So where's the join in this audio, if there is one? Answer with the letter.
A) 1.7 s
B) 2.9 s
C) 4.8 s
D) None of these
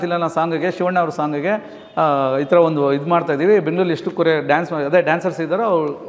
D